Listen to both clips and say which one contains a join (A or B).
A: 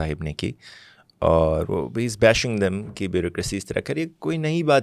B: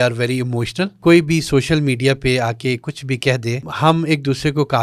B